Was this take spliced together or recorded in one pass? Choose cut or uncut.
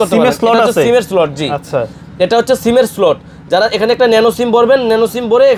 uncut